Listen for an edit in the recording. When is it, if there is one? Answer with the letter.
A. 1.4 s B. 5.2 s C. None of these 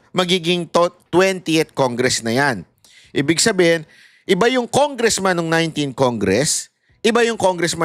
C